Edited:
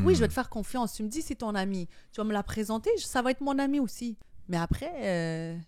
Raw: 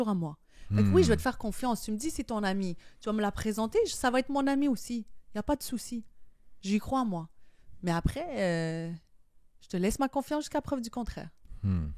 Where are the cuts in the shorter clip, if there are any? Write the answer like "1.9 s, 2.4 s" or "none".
4.3 s